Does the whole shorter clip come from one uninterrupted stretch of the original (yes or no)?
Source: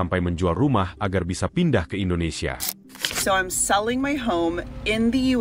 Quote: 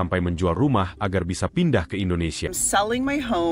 no